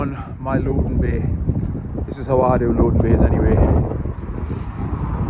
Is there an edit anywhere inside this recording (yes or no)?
no